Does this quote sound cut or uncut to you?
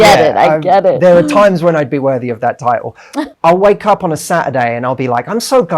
cut